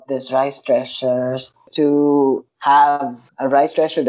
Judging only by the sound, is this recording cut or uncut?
cut